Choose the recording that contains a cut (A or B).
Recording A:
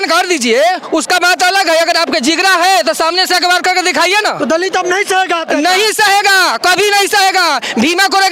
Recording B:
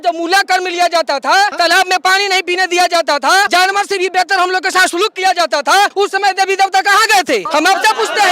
B